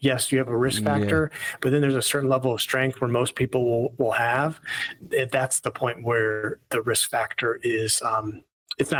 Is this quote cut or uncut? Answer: uncut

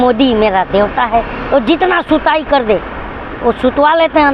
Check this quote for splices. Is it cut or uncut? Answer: uncut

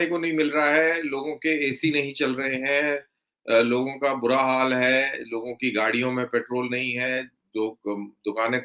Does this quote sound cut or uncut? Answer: uncut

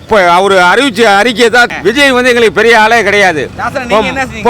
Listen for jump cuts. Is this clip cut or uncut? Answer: cut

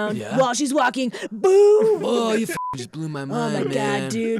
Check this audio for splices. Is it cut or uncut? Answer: uncut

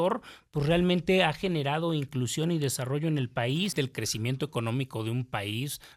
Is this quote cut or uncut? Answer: cut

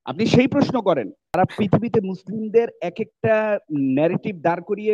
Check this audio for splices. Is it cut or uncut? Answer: cut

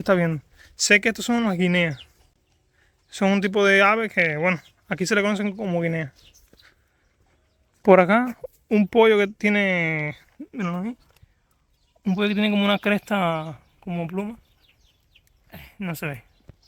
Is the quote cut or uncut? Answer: uncut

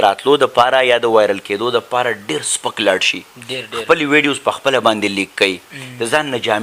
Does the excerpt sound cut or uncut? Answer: uncut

